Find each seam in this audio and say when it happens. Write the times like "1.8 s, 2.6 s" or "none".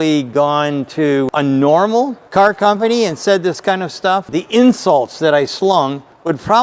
1.3 s, 2.2 s, 4.3 s